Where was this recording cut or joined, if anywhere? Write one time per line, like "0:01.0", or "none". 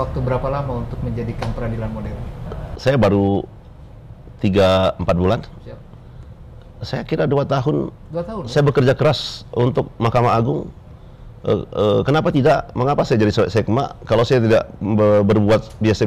0:02.4